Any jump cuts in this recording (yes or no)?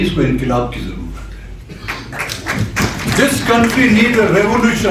no